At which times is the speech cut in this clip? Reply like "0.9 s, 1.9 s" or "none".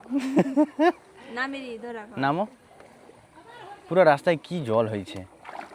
none

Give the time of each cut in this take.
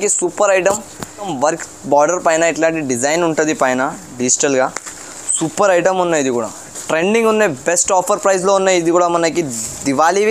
1.2 s

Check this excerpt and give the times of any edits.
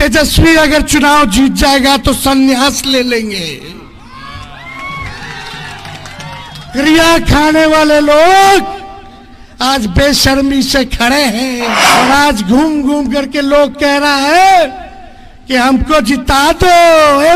11.8 s

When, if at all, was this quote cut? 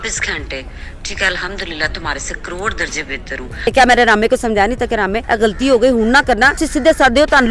3.7 s, 5.2 s, 6.6 s

